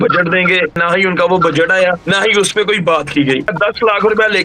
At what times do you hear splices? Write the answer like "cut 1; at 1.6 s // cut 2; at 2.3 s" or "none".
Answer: cut 1; at 0.8 s // cut 2; at 2.0 s // cut 3; at 3.5 s